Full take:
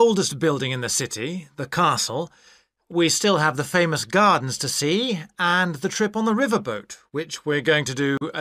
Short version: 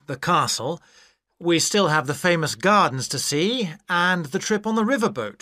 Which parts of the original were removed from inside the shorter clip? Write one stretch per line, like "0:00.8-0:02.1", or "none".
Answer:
none